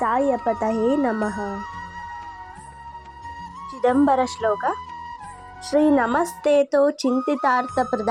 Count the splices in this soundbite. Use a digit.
2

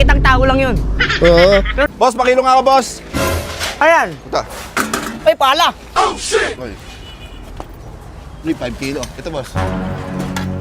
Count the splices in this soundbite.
1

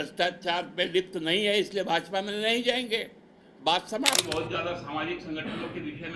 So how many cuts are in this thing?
1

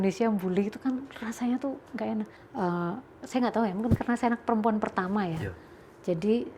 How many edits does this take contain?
1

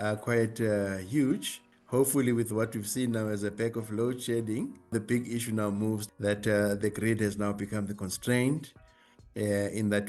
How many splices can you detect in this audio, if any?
0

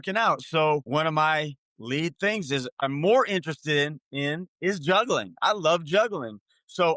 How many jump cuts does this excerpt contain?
2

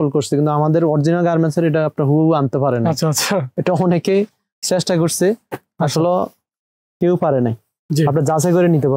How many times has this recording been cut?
0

